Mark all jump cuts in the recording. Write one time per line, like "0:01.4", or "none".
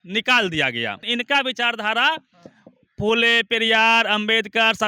0:01.0